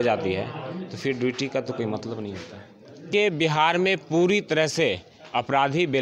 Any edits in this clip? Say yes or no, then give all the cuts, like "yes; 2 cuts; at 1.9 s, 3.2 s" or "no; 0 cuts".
yes; 1 cut; at 3.1 s